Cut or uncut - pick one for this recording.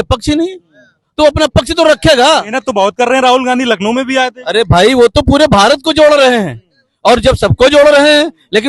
uncut